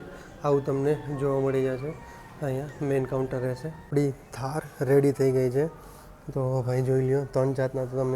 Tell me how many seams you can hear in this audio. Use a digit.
1